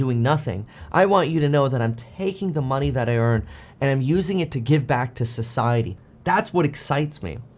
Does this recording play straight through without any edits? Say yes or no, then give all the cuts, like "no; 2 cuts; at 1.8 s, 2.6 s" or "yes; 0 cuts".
no; 1 cut; at 6.0 s